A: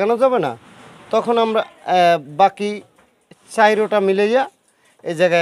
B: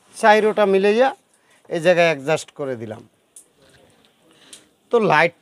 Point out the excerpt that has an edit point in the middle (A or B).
B